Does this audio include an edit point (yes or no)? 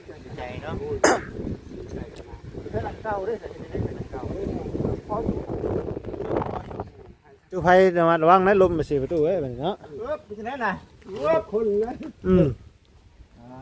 yes